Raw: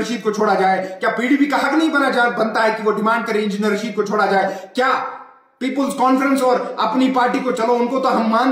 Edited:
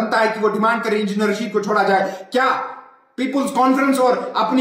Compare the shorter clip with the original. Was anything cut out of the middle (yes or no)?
no